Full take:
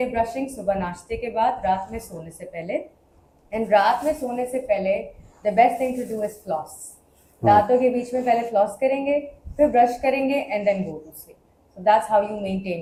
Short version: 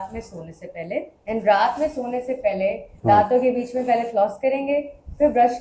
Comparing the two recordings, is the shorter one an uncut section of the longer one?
no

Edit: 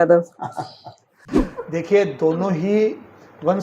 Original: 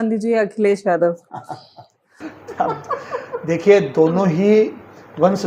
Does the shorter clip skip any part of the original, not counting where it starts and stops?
yes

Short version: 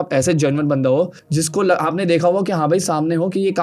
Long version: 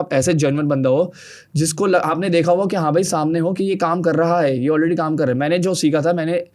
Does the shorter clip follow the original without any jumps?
no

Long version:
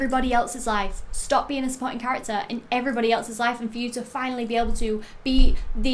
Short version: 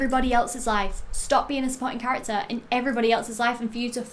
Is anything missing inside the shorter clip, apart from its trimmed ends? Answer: no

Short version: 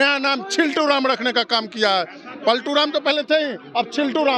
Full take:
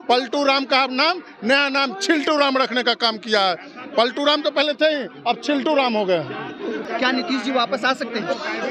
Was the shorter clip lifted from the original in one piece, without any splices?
yes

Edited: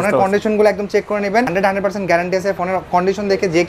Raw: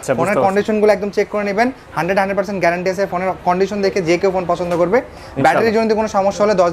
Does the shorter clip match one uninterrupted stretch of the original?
no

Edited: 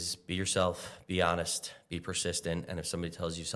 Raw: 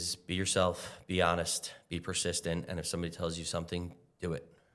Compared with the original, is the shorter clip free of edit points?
yes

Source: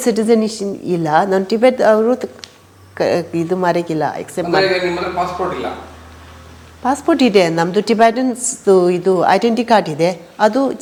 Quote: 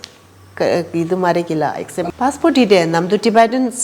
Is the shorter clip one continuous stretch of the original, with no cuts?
no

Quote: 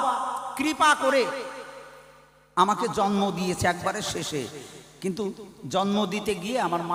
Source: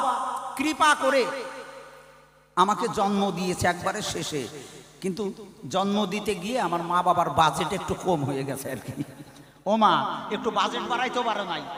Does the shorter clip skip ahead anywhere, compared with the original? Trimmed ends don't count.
no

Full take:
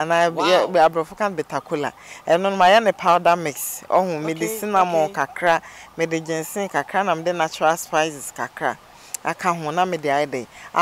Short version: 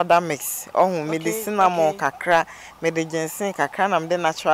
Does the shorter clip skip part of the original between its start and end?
no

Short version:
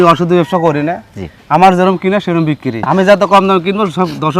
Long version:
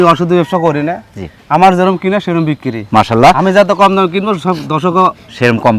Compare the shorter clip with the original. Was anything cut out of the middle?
yes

